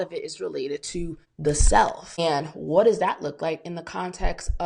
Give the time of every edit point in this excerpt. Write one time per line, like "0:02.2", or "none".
0:01.2
0:02.2